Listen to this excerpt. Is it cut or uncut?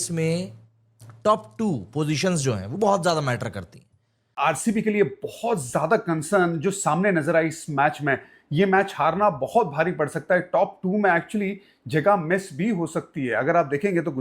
cut